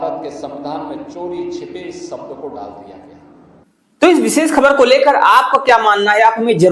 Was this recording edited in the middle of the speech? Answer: no; 0 cuts

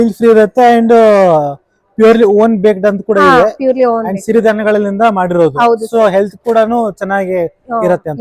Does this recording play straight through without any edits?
yes; 0 cuts

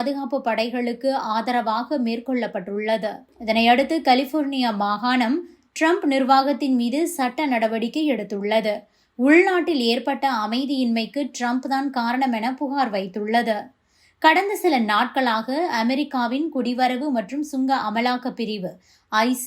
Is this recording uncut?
no; 1 cut; at 3.2 s

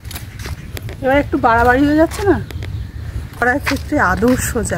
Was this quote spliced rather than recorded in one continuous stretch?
yes; 1 cut; at 3.4 s

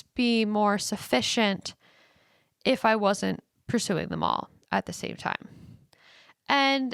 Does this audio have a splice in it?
no; 0 cuts

